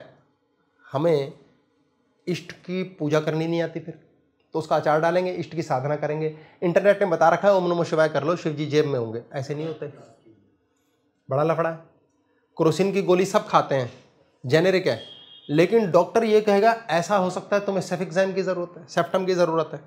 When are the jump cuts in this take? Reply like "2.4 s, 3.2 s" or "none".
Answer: none